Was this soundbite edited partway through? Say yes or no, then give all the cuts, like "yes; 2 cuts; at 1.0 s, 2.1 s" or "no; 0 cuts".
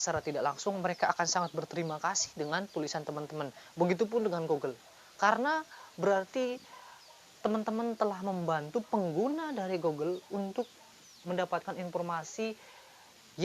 no; 0 cuts